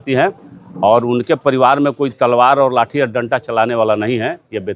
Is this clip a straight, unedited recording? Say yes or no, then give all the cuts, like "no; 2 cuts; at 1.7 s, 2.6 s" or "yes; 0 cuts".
yes; 0 cuts